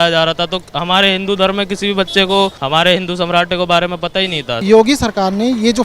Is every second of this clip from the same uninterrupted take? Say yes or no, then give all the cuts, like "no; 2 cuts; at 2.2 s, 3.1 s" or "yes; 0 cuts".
no; 2 cuts; at 2.6 s, 4.6 s